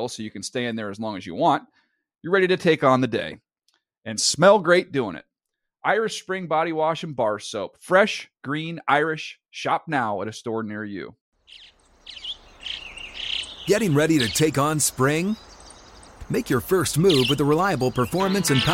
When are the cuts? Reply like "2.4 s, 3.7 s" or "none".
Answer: 11.2 s